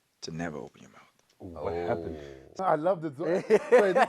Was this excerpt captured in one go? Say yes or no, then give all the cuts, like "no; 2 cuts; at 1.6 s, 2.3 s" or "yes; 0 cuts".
no; 1 cut; at 2.6 s